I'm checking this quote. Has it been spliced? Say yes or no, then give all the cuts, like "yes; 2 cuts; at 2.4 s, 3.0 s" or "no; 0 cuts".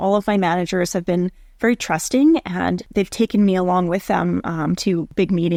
no; 0 cuts